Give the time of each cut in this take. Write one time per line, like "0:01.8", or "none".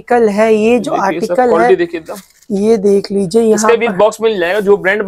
none